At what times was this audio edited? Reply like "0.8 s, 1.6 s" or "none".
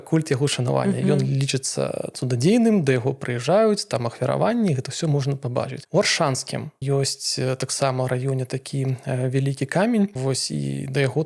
none